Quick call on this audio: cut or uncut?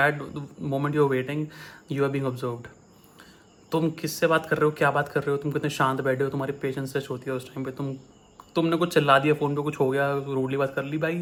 uncut